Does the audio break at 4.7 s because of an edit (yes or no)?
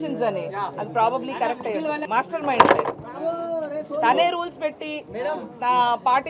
no